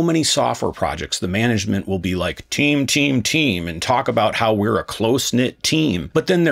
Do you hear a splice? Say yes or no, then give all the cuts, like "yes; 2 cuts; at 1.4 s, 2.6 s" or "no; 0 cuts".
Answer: no; 0 cuts